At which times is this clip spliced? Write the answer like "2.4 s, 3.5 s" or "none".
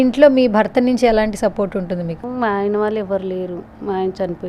2.2 s